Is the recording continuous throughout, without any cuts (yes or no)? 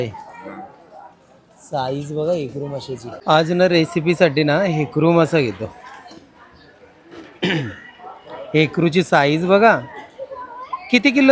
no